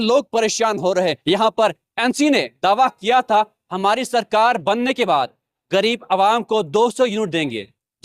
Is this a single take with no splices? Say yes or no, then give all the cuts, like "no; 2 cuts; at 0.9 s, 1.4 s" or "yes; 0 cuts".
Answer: no; 1 cut; at 1.2 s